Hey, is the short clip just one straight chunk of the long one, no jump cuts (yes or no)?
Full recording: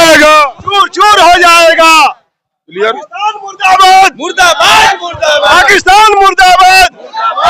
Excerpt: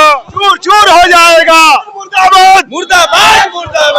no